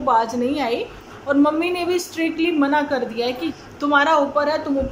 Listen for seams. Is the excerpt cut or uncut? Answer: cut